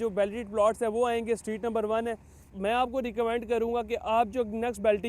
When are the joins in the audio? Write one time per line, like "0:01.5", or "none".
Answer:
0:02.5

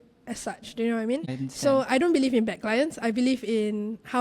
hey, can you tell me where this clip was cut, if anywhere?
0:01.3

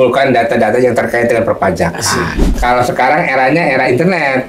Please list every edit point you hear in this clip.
0:02.5

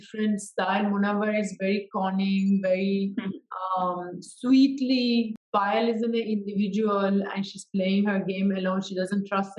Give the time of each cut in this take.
0:05.4

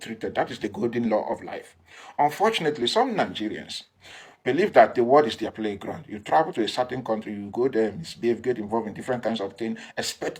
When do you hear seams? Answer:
none

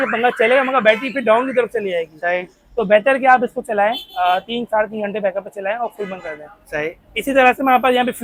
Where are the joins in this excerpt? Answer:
none

